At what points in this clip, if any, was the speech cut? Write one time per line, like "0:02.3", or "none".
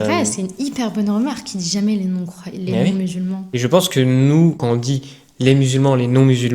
0:03.5
0:04.6